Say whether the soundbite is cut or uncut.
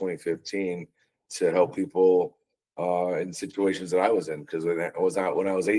uncut